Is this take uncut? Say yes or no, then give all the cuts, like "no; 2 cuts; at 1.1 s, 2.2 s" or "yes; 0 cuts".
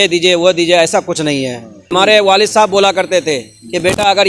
no; 1 cut; at 1.8 s